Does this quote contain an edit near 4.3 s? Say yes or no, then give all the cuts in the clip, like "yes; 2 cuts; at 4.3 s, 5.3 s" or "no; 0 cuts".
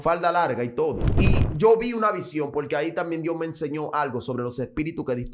no; 1 cut; at 1.1 s